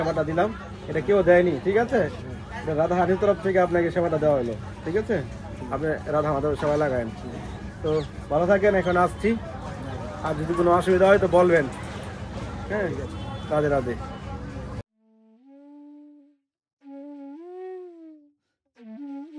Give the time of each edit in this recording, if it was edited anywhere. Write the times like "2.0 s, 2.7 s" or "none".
none